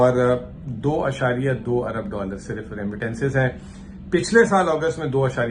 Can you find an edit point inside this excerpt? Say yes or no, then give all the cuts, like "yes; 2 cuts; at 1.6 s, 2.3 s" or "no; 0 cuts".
no; 0 cuts